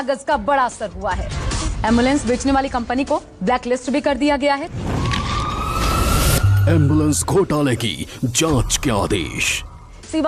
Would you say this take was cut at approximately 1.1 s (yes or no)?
yes